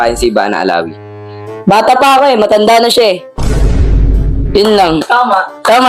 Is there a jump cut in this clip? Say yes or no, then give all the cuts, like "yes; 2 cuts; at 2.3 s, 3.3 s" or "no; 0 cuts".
no; 0 cuts